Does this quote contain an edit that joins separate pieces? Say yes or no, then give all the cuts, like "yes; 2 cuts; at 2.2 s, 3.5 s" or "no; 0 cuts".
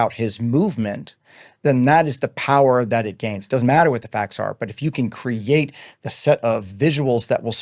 no; 0 cuts